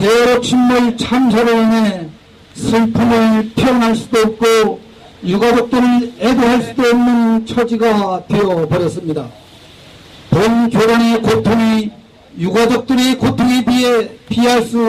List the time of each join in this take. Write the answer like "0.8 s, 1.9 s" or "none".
none

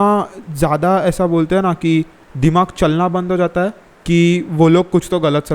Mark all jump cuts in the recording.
2.2 s, 3.9 s

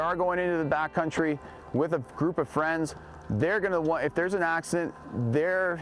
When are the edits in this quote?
none

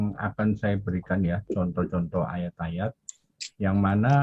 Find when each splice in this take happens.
none

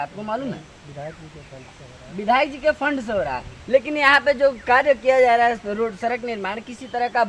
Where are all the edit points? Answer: none

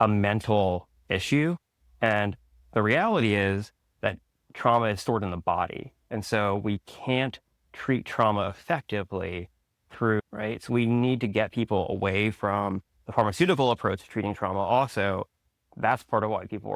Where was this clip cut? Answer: 10.2 s

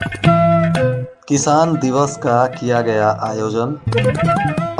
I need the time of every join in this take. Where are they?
1.1 s

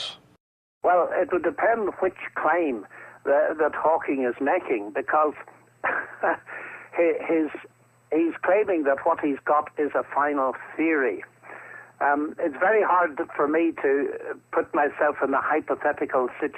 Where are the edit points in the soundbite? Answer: 12.4 s

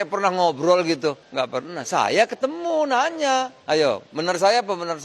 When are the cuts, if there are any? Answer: 1.2 s, 3.6 s

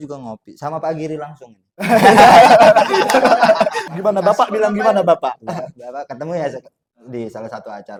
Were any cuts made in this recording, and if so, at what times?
none

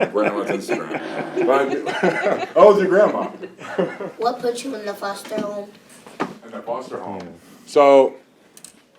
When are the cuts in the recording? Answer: 4.0 s

